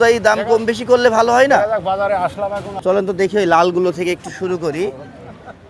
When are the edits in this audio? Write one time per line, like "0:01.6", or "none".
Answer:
0:02.8